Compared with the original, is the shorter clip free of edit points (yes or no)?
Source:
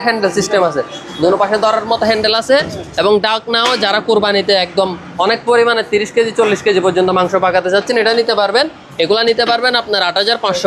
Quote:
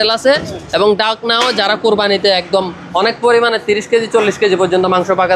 yes